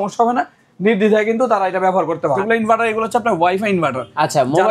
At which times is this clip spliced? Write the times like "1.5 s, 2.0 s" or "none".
2.4 s